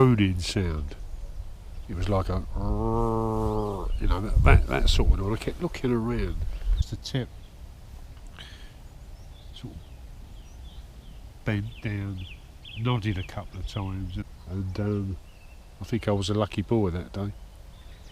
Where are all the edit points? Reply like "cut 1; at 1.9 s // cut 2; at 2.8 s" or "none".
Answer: cut 1; at 6.8 s // cut 2; at 14.2 s